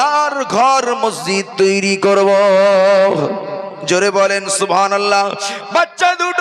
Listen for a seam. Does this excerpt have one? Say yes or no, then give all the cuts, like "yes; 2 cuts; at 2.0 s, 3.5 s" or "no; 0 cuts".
no; 0 cuts